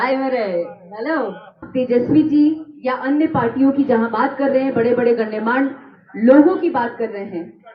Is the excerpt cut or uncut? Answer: cut